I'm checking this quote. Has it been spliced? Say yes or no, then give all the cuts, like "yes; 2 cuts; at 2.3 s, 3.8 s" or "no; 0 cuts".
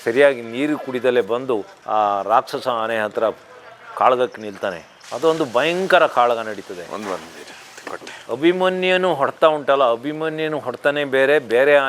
no; 0 cuts